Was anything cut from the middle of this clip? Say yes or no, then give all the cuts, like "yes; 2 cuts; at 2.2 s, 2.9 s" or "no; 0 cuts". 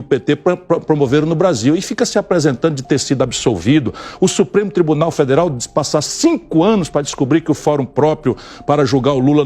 no; 0 cuts